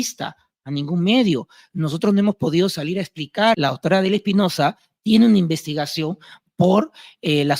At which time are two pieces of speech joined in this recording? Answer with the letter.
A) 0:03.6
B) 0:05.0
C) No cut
A